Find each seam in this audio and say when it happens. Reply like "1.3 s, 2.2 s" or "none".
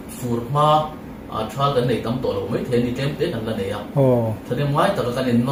none